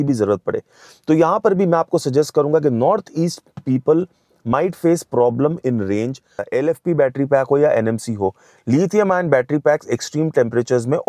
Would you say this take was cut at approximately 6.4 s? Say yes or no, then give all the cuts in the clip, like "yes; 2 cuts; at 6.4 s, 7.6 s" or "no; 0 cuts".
yes; 1 cut; at 6.4 s